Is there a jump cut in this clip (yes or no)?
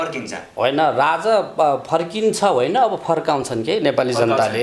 no